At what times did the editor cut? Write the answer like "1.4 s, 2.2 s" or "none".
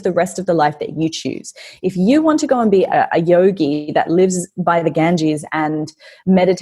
none